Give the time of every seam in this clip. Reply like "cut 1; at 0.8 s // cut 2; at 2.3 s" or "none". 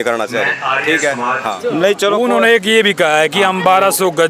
cut 1; at 1.5 s

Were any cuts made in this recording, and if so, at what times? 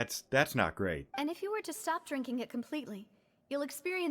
cut 1; at 1.1 s

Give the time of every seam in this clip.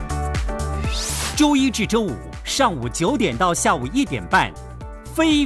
cut 1; at 1.3 s // cut 2; at 2.2 s

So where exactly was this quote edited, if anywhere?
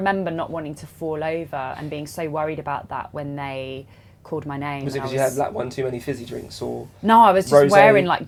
none

